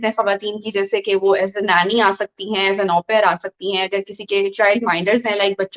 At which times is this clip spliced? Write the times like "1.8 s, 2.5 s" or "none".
none